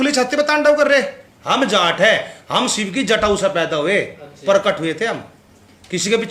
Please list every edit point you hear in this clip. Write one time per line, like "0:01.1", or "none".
0:01.2